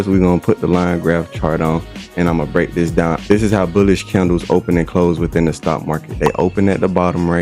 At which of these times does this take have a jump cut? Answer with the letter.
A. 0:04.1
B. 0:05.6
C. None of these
C